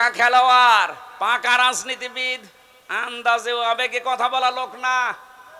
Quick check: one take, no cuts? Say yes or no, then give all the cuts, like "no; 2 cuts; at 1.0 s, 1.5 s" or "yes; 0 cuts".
yes; 0 cuts